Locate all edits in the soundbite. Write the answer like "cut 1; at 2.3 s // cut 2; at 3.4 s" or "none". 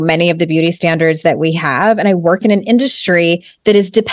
none